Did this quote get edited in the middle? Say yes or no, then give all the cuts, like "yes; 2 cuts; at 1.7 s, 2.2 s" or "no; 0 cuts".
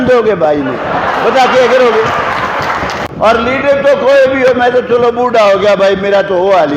yes; 1 cut; at 2.9 s